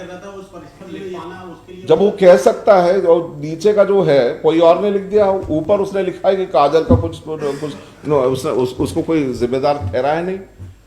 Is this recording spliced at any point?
yes; 1 cut; at 1.2 s

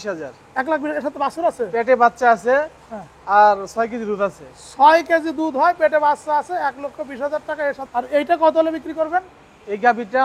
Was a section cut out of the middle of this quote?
yes; 1 cut; at 7.8 s

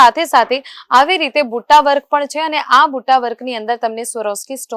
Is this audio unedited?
yes; 0 cuts

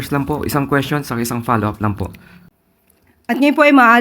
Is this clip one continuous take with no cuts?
no; 1 cut; at 2.3 s

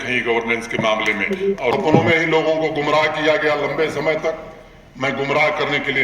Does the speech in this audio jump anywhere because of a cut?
yes; 1 cut; at 1.7 s

